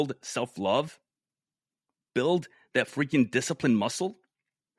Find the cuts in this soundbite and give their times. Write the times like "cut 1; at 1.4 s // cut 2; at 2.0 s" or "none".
none